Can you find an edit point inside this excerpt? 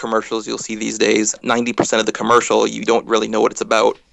yes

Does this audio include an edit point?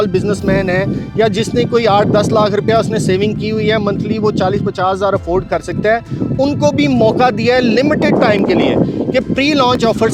no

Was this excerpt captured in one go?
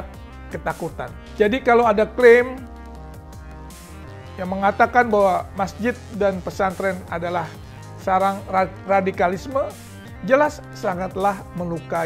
no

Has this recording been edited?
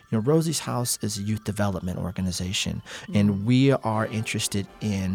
no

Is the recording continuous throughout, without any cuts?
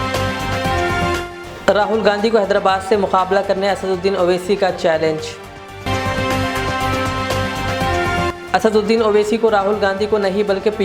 no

